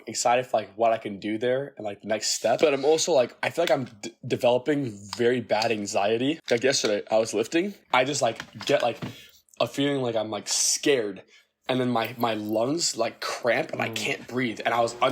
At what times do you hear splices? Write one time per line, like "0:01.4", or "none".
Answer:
0:02.6
0:03.4
0:06.4
0:07.8